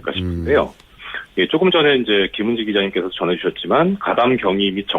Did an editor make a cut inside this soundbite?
yes; 1 cut; at 1.7 s

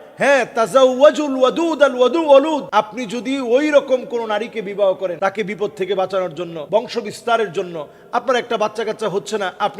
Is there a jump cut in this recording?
yes; 3 cuts; at 2.6 s, 5.2 s, 6.6 s

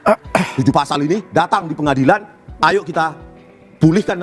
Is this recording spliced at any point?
no; 0 cuts

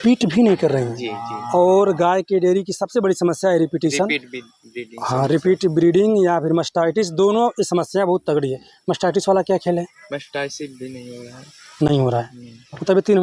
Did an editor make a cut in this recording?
no; 0 cuts

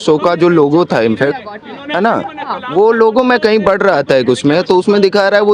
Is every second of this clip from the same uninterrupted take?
yes; 0 cuts

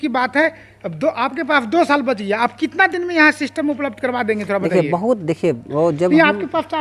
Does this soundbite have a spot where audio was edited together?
no; 0 cuts

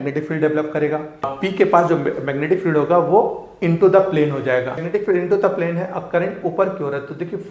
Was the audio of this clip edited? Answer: yes; 2 cuts; at 1.3 s, 4.8 s

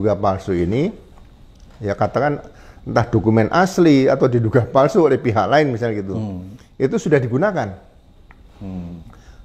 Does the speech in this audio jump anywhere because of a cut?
no; 0 cuts

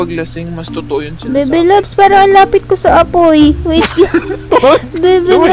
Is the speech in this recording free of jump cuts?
no; 1 cut; at 3.6 s

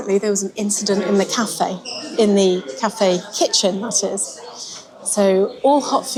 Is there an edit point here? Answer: no; 0 cuts

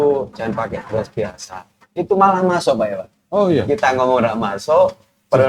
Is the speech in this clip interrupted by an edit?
no; 0 cuts

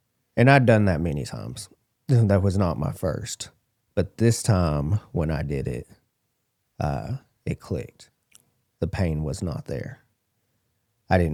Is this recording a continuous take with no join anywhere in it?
yes; 0 cuts

